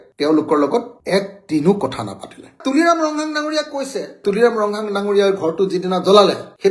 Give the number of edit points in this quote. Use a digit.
0